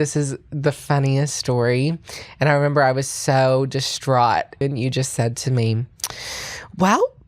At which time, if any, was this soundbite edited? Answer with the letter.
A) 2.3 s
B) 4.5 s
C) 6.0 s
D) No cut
B